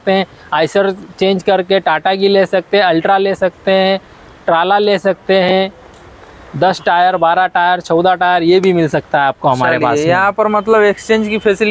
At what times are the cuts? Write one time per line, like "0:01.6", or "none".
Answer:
none